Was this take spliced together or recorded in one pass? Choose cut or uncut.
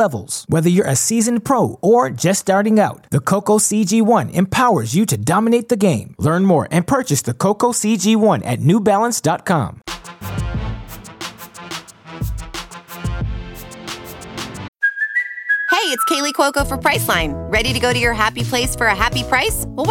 uncut